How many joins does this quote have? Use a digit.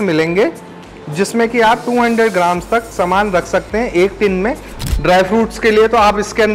1